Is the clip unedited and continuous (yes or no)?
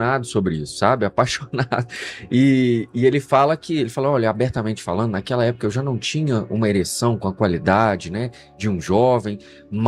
yes